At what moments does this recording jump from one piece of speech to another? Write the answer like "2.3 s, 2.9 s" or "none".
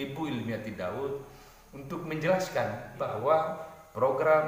3.0 s